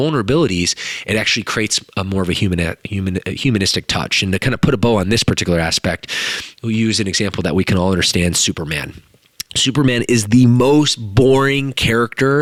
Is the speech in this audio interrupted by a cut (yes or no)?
no